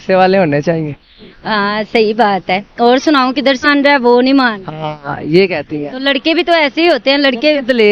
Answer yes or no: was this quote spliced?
yes